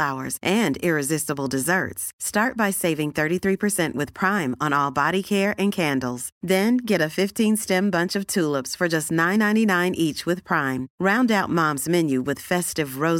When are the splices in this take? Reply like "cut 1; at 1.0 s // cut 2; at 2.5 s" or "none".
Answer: none

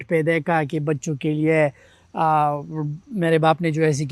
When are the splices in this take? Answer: none

